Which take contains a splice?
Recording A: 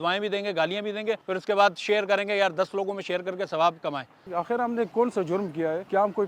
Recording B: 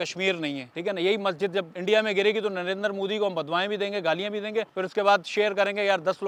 A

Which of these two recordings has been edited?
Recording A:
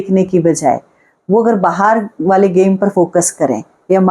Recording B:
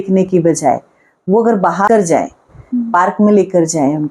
B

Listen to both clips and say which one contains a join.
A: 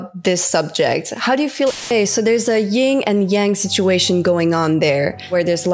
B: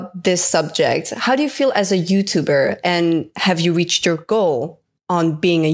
A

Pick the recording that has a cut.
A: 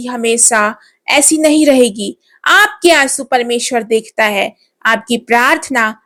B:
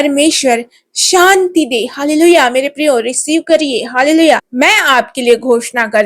B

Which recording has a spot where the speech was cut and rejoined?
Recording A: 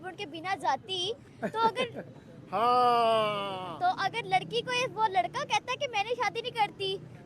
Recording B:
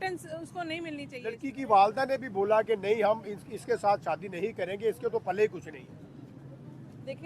B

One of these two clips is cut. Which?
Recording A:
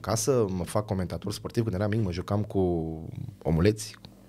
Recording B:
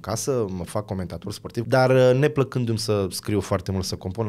B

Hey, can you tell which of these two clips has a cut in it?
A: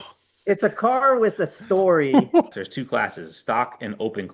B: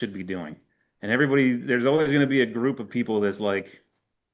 A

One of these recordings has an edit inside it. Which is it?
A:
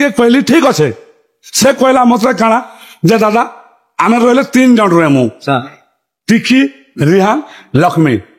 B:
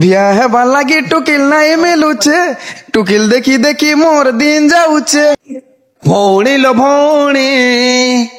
B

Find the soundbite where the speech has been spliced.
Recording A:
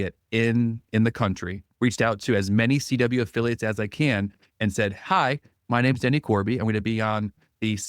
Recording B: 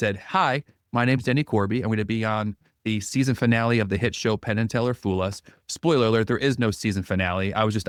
A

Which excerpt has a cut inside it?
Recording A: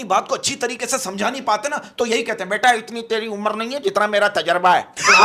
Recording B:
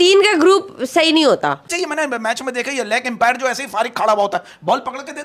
B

